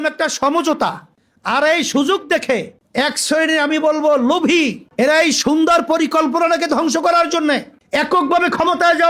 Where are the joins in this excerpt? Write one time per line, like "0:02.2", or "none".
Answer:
0:07.7